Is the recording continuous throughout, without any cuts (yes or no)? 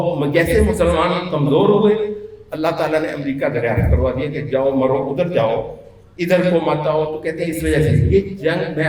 yes